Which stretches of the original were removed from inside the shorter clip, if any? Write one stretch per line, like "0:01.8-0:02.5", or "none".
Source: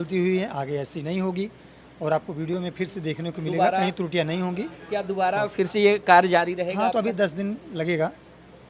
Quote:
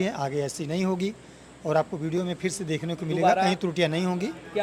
none